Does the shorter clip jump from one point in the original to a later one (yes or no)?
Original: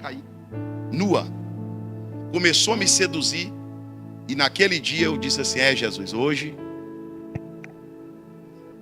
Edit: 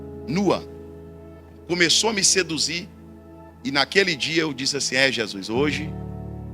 no